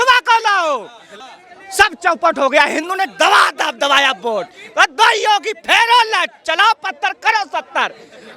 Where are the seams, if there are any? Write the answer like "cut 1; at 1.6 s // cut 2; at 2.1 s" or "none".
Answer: cut 1; at 1.1 s